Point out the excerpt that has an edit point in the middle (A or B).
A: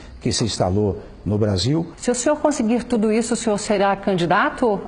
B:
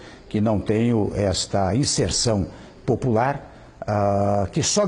A